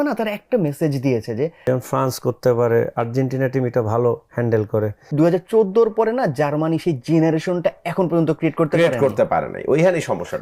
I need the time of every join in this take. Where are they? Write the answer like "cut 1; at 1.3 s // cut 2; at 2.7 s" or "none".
cut 1; at 1.6 s // cut 2; at 5.1 s